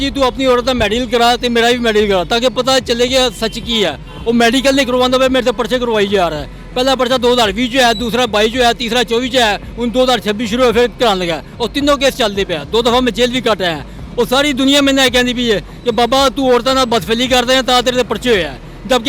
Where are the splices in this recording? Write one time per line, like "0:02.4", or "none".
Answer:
none